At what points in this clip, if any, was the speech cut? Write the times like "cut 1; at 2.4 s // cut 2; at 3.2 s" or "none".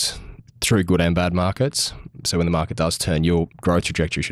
none